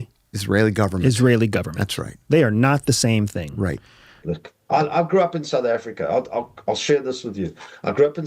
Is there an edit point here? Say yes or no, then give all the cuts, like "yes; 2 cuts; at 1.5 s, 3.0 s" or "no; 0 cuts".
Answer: yes; 1 cut; at 4.1 s